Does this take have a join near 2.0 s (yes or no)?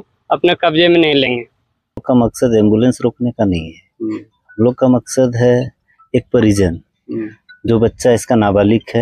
yes